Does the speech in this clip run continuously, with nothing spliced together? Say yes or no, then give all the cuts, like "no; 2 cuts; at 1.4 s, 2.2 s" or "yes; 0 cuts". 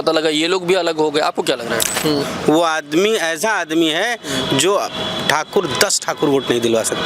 no; 1 cut; at 1.9 s